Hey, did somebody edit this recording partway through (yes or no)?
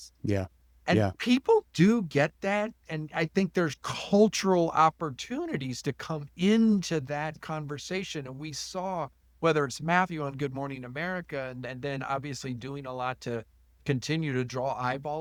no